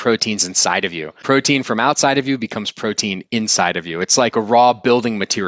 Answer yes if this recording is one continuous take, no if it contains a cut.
no